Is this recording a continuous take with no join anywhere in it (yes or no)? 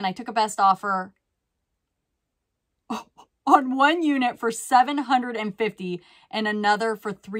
yes